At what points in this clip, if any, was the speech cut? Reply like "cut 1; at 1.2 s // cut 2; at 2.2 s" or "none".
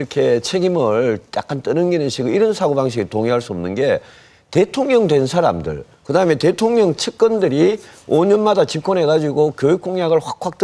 cut 1; at 9.6 s